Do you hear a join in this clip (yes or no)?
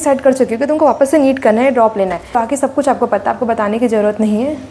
yes